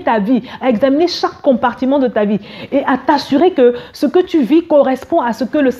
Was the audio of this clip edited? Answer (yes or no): no